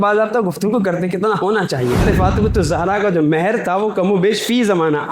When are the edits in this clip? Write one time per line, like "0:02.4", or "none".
0:02.0